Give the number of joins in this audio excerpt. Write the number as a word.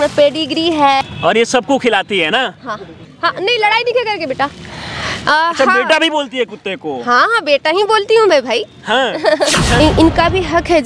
three